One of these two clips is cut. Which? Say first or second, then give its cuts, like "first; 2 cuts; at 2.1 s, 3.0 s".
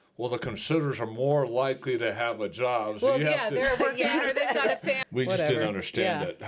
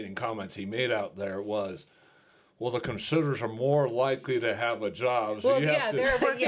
first; 1 cut; at 5.0 s